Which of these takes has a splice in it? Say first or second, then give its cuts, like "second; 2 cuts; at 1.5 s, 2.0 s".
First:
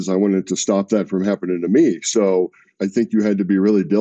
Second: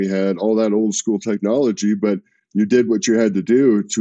first; 1 cut; at 2.7 s